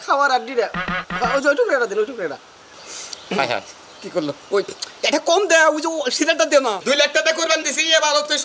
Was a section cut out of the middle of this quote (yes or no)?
yes